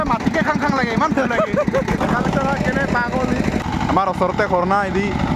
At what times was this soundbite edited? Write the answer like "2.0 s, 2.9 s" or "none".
2.0 s, 3.6 s